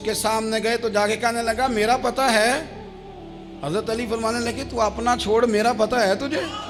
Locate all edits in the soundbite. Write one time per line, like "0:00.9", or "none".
none